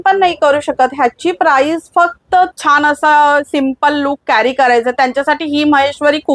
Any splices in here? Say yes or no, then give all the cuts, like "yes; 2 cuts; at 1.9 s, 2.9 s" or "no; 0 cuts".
yes; 1 cut; at 2.5 s